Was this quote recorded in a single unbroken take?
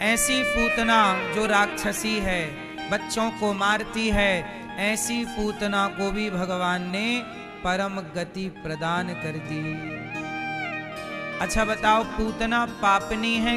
yes; 0 cuts

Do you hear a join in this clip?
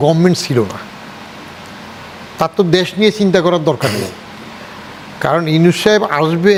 no; 0 cuts

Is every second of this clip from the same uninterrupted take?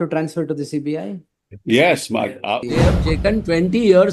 no; 1 cut; at 2.7 s

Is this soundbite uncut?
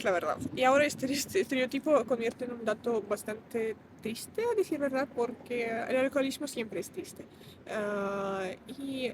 yes; 0 cuts

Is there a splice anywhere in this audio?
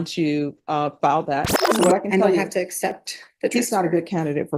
yes; 1 cut; at 1.6 s

